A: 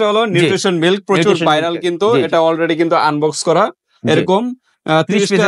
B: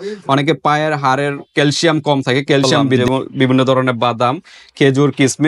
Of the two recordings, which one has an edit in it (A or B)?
B